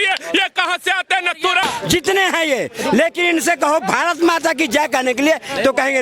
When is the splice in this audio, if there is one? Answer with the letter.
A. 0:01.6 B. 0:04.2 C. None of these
A